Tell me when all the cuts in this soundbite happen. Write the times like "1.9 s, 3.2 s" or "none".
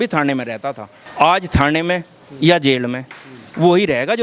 1.0 s